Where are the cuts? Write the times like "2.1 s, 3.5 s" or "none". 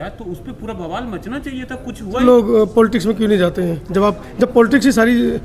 2.2 s